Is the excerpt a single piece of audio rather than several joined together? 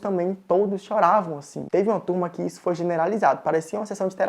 yes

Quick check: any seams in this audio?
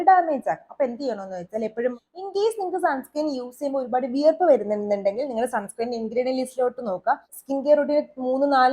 yes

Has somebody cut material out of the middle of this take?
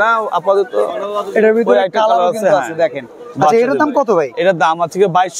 no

